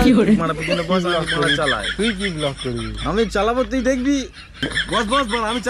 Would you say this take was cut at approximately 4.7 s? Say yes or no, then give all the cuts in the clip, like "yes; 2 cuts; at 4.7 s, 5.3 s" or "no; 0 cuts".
yes; 1 cut; at 4.7 s